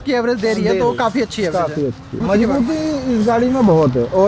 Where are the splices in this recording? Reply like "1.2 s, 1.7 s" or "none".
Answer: 2.1 s